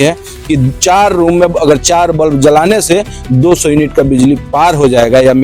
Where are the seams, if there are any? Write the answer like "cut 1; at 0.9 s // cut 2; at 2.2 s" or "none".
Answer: none